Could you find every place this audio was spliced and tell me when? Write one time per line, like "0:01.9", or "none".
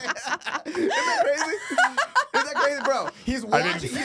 none